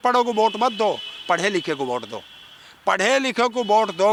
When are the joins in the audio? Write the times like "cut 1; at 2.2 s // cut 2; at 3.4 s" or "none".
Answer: none